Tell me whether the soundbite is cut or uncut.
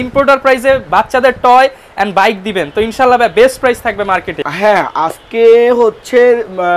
uncut